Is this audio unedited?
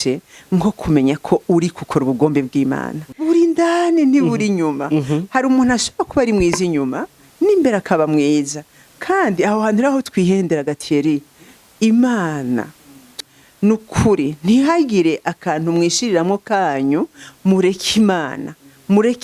no; 2 cuts; at 3.1 s, 13.2 s

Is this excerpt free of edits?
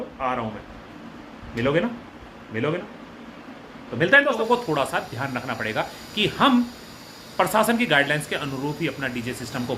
no; 1 cut; at 4.4 s

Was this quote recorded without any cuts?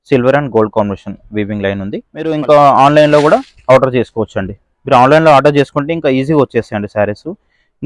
no; 1 cut; at 2.3 s

